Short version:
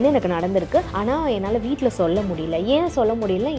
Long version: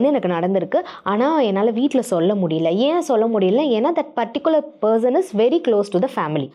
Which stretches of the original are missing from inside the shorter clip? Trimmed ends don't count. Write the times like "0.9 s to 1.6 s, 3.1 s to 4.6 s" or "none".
0.9 s to 1.1 s